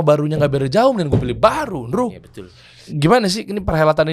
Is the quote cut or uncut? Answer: cut